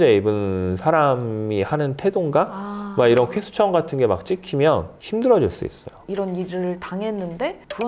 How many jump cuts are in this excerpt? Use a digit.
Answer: 0